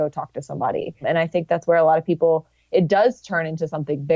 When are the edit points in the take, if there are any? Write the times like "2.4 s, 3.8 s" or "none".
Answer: 1.0 s